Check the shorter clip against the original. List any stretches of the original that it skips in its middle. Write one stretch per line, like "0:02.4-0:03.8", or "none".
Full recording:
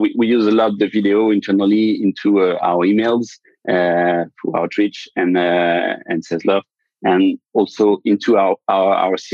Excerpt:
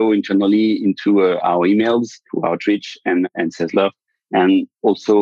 0:03.4-0:04.4
0:05.4-0:06.0